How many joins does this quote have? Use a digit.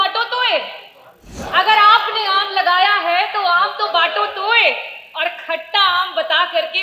1